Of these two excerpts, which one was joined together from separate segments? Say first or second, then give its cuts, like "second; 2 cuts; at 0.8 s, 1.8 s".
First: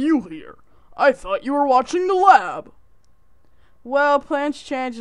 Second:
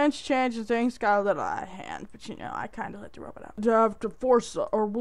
second; 1 cut; at 3.6 s